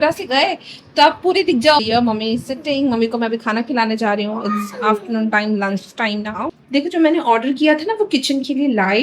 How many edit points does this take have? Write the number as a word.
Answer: two